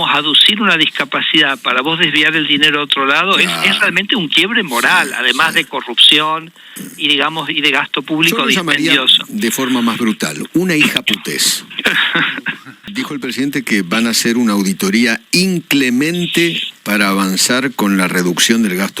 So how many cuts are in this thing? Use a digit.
1